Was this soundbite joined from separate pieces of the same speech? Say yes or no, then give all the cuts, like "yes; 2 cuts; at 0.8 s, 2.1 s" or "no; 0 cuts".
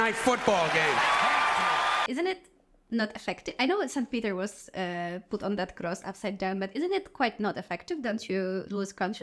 yes; 1 cut; at 2.0 s